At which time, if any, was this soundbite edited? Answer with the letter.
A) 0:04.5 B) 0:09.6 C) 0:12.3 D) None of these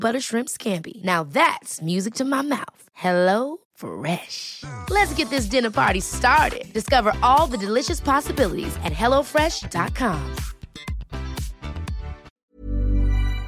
C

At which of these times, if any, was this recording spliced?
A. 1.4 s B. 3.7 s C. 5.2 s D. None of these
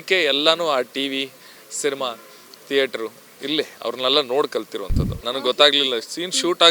C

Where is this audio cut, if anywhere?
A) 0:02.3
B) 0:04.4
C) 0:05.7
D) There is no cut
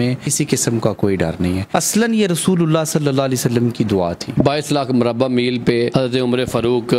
B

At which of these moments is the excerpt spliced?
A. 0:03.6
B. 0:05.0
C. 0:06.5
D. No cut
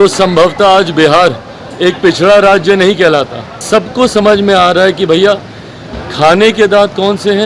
A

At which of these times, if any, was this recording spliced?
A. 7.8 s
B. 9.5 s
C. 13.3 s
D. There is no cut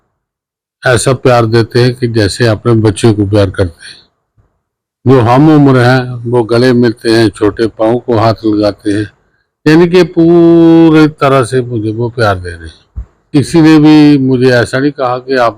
C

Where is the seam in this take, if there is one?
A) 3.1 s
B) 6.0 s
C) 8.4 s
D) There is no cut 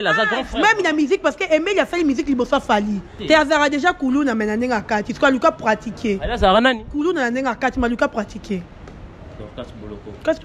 A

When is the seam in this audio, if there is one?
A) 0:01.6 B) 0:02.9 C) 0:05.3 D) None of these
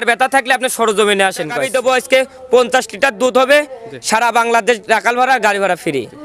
A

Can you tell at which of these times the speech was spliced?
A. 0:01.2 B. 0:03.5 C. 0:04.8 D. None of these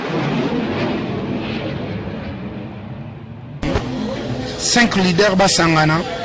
B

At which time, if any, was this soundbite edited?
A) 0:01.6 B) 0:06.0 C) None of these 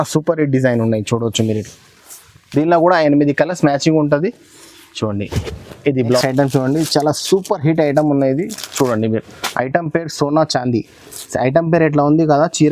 B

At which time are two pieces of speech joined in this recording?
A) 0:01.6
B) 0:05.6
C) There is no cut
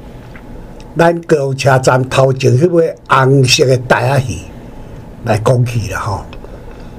C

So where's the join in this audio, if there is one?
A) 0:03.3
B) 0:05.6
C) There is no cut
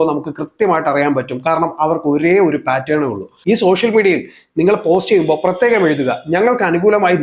A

